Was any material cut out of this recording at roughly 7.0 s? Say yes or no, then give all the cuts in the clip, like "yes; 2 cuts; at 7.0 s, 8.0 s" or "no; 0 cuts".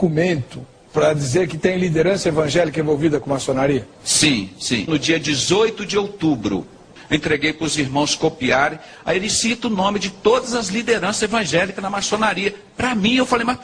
yes; 1 cut; at 7.0 s